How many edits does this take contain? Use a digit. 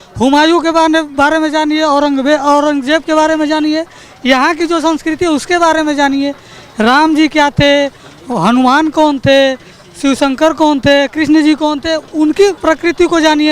1